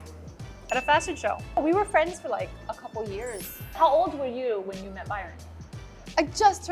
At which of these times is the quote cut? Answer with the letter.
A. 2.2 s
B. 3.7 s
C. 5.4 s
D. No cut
B